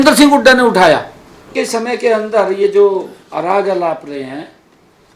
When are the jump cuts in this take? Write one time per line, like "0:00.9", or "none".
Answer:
0:01.5